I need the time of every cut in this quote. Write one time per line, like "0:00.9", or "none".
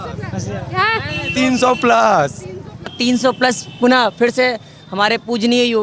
0:02.9